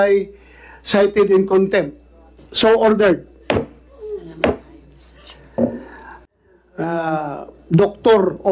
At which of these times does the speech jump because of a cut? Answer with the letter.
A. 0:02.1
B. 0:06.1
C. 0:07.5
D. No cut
B